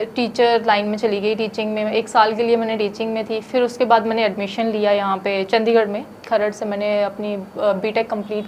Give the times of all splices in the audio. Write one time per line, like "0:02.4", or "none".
none